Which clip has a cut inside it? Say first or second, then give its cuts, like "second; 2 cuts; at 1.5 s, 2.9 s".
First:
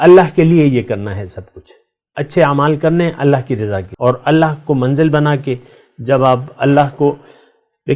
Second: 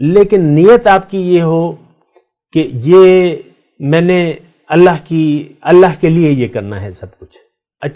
first; 1 cut; at 3.8 s